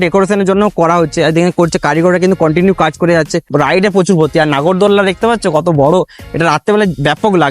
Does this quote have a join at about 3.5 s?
yes; 1 cut; at 3.5 s

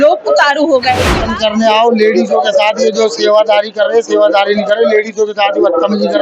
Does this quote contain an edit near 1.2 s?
yes; 1 cut; at 1.2 s

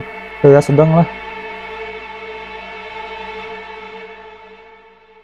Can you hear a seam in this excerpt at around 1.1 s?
yes; 1 cut; at 1.1 s

